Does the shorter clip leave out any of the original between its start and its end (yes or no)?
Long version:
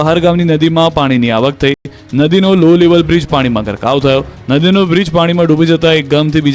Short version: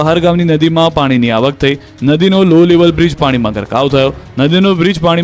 yes